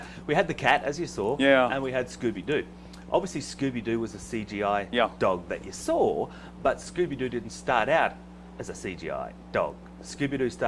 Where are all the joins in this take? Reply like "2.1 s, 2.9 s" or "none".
6.8 s